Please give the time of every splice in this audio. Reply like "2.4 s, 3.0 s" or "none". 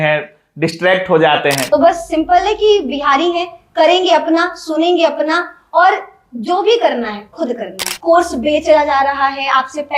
1.8 s, 7.9 s